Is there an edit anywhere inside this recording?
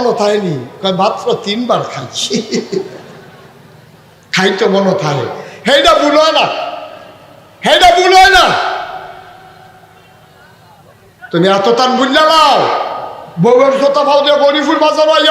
no; 0 cuts

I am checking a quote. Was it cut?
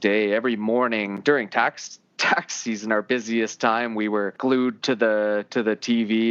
yes; 2 cuts; at 1.2 s, 4.3 s

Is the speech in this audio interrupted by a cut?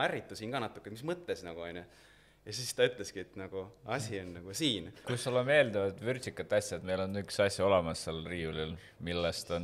yes; 1 cut; at 5.0 s

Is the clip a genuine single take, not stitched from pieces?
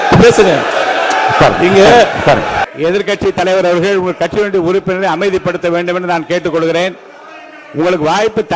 no; 1 cut; at 2.7 s

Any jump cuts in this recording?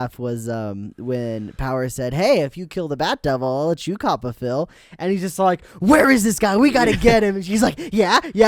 no; 0 cuts

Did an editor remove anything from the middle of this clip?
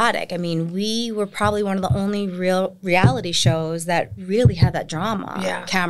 no; 0 cuts

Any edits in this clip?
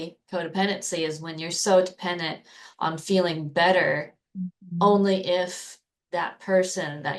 no; 0 cuts

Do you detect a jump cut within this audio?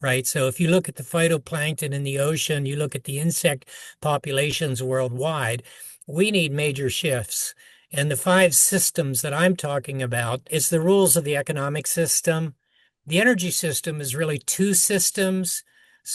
yes; 1 cut; at 10.4 s

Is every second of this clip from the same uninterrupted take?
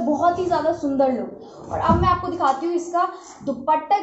yes; 0 cuts

